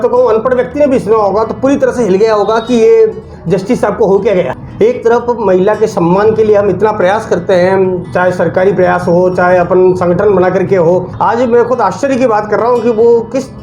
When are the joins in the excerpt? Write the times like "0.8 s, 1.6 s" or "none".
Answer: 4.6 s, 11.1 s